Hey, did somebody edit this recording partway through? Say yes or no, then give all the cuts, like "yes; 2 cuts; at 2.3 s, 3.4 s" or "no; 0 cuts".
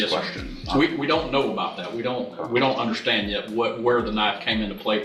no; 0 cuts